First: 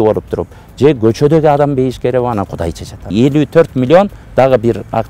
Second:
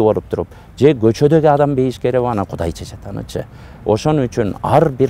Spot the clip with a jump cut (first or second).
first